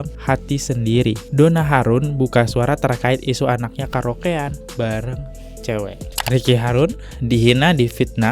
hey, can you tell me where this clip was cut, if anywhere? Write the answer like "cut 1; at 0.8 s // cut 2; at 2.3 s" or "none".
cut 1; at 1.3 s // cut 2; at 6.1 s